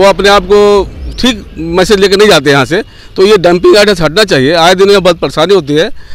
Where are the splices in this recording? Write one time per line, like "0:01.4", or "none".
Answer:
none